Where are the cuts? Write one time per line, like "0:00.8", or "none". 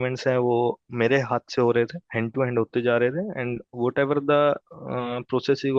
none

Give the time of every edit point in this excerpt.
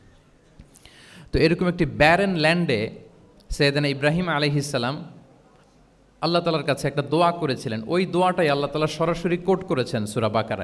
none

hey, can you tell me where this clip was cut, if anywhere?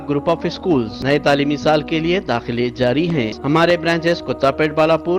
0:00.9
0:03.4

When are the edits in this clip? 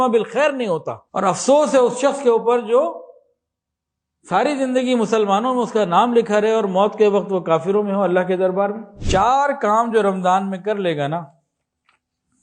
0:01.0
0:08.9

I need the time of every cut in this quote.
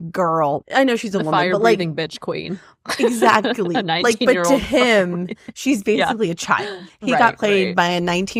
none

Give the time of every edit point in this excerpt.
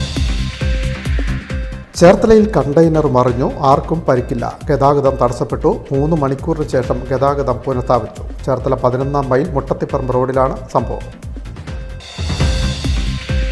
0:01.6

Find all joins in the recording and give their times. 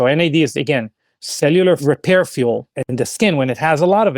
0:01.8
0:02.8

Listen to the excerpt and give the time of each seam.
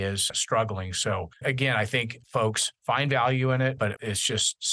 0:01.3
0:02.3
0:04.0

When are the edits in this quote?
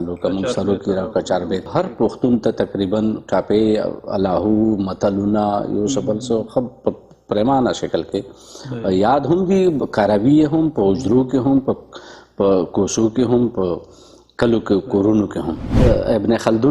0:01.7
0:15.7

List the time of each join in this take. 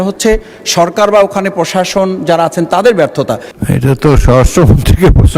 0:03.5

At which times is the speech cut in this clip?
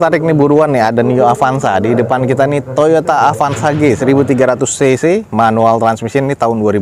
none

